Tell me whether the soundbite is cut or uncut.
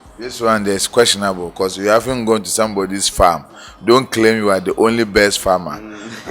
uncut